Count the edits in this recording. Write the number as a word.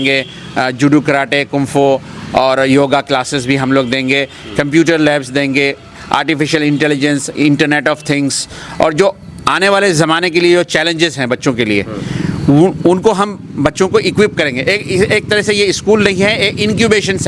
zero